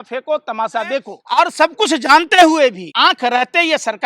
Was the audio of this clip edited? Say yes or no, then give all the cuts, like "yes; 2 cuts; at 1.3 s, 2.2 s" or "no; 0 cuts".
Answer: yes; 2 cuts; at 1.2 s, 2.9 s